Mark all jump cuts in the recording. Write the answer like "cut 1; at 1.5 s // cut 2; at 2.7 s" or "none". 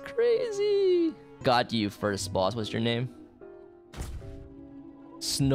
cut 1; at 1.4 s